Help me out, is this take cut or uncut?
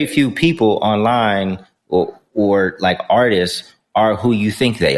uncut